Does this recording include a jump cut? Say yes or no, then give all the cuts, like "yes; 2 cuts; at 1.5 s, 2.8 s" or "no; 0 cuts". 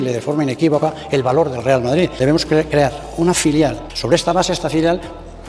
yes; 2 cuts; at 2.1 s, 3.9 s